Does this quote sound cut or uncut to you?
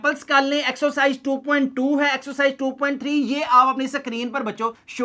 uncut